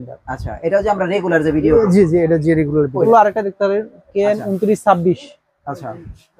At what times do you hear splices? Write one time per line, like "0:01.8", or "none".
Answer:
0:03.1